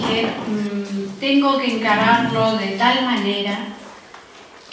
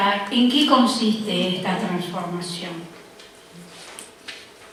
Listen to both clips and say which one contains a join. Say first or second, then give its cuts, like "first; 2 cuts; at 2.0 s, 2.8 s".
first; 1 cut; at 1.6 s